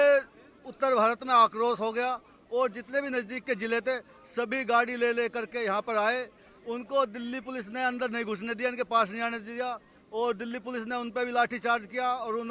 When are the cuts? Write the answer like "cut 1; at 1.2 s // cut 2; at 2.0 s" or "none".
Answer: none